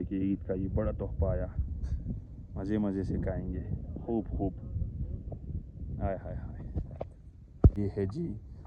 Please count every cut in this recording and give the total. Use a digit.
1